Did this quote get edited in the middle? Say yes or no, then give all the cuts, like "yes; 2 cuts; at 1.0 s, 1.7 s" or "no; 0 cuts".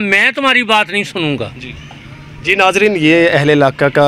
no; 0 cuts